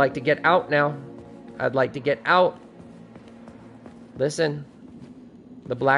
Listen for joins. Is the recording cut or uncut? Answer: uncut